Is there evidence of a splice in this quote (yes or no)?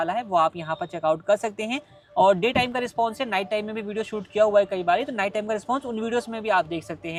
no